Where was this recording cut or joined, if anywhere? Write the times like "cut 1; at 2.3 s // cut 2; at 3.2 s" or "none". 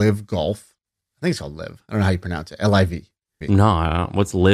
cut 1; at 3.4 s